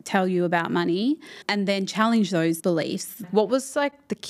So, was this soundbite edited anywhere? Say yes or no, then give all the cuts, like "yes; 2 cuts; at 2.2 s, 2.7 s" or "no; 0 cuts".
yes; 2 cuts; at 1.3 s, 2.9 s